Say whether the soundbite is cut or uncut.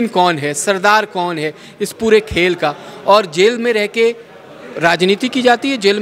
uncut